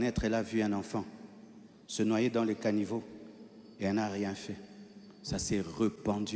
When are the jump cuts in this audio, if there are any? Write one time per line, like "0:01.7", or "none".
none